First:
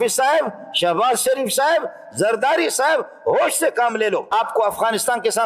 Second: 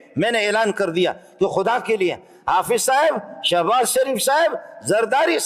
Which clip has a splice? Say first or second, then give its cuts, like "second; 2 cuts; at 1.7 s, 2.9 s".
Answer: first; 1 cut; at 4.3 s